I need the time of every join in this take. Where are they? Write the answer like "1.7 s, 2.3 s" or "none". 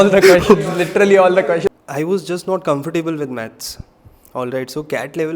1.7 s